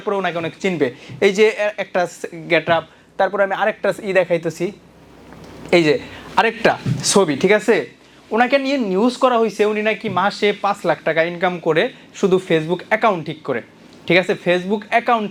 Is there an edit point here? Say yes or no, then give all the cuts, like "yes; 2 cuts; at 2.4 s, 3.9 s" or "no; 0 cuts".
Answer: no; 0 cuts